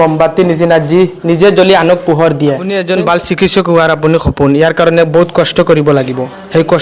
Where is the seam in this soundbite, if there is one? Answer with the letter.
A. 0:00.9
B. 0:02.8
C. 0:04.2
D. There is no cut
B